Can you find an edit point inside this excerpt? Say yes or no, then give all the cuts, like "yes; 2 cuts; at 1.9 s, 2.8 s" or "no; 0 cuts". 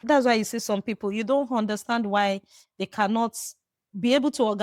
no; 0 cuts